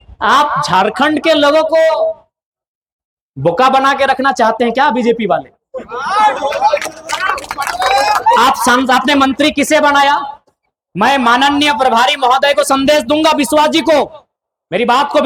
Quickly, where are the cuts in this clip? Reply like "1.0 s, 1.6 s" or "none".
none